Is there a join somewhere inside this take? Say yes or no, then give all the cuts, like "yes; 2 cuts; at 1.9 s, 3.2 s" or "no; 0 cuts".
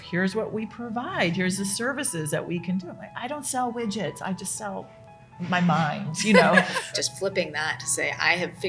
yes; 1 cut; at 6.9 s